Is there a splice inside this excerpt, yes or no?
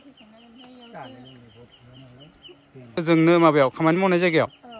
no